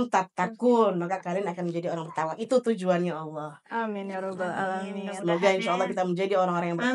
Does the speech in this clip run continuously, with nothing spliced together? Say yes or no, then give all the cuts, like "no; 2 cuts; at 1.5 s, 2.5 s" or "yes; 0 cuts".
yes; 0 cuts